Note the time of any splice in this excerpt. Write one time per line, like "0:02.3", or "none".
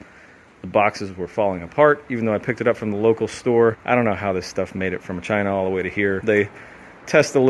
0:03.8
0:06.2

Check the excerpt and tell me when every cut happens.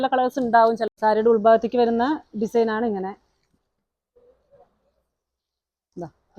0:00.9

